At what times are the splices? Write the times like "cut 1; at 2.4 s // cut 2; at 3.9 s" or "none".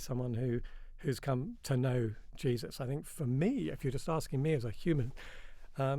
cut 1; at 1.6 s